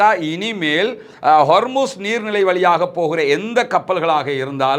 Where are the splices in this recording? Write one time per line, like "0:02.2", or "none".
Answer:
none